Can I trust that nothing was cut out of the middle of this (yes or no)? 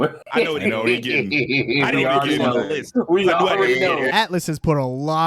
no